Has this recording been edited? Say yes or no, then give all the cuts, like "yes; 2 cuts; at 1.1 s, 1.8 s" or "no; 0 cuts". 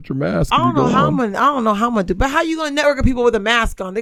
no; 0 cuts